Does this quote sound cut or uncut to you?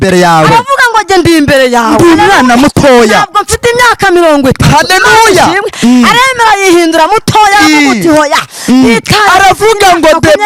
uncut